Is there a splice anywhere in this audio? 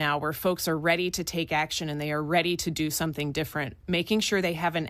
no; 0 cuts

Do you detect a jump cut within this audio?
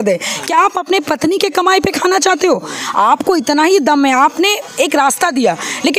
no; 0 cuts

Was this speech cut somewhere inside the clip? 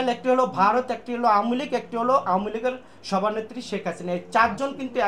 no; 0 cuts

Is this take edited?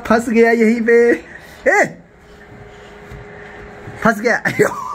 no; 0 cuts

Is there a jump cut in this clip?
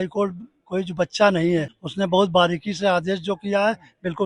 yes; 1 cut; at 1.8 s

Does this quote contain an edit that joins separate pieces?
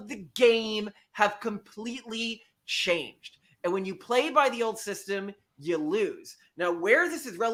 no; 0 cuts

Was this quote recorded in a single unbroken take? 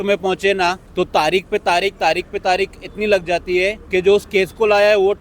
no; 2 cuts; at 0.8 s, 3.8 s

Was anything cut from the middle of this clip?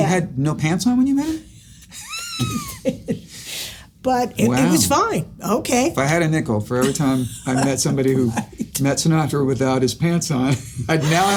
no; 0 cuts

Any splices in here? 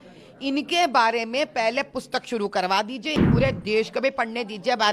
yes; 1 cut; at 3.2 s

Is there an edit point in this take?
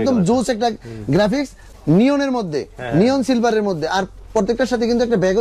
yes; 1 cut; at 1.6 s

